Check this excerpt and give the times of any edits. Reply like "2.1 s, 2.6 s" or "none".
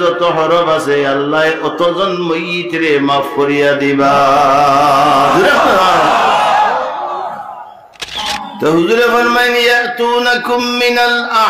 8.1 s